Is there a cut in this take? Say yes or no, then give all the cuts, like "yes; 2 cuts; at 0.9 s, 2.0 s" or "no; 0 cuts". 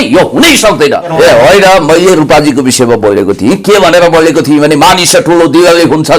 yes; 1 cut; at 1.1 s